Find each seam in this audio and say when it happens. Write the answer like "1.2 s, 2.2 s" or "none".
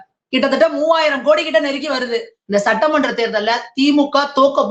2.3 s